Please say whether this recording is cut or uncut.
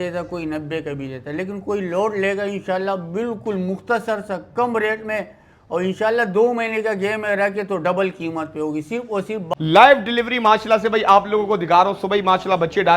cut